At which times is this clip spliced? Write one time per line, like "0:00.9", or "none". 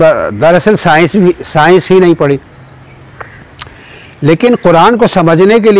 none

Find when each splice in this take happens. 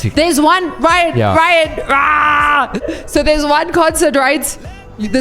0:02.8

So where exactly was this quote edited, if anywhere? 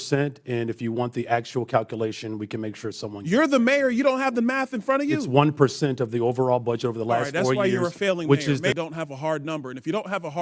0:08.7

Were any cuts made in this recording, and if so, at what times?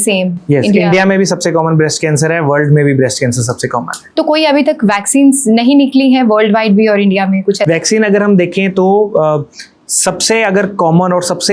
none

